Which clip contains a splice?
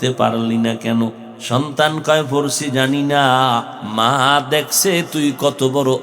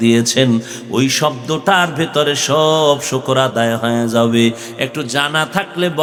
first; 2 cuts; at 1.3 s, 3.8 s

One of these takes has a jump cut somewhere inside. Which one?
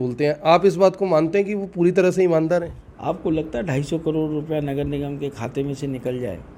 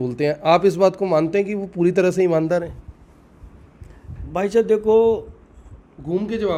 first; 1 cut; at 2.8 s

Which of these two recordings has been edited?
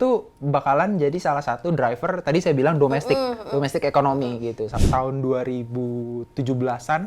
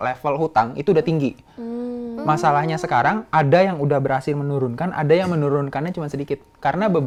first; 1 cut; at 4.7 s

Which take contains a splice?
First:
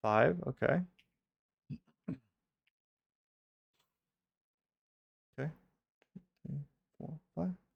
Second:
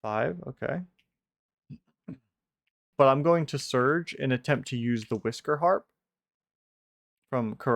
second; 1 cut; at 2.8 s

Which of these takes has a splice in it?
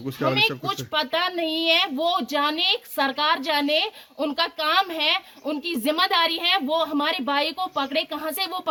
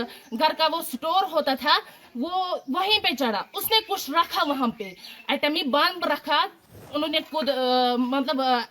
second; 1 cut; at 6.8 s

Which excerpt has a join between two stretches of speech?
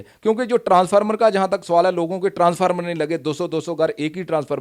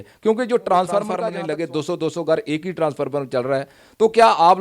second; 1 cut; at 1.3 s

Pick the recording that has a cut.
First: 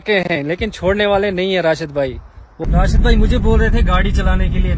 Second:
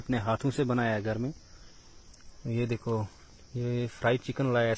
first; 1 cut; at 2.7 s

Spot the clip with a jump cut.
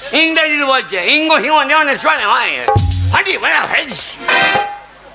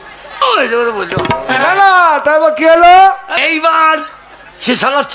second; 1 cut; at 3.4 s

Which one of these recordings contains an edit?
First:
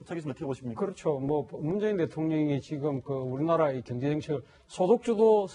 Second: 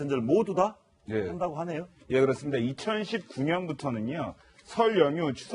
second; 1 cut; at 4.4 s

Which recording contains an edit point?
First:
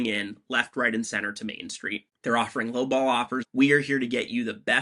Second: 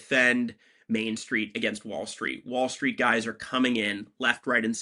first; 2 cuts; at 2.1 s, 3.4 s

